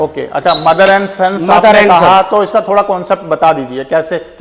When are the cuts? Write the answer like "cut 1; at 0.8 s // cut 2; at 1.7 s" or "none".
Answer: none